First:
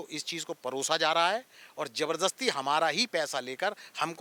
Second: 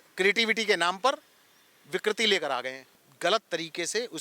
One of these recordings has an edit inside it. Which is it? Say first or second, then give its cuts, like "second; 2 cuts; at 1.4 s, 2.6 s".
second; 1 cut; at 3.1 s